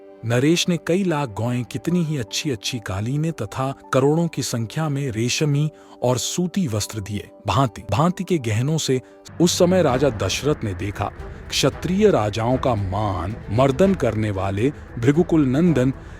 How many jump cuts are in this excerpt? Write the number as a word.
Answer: one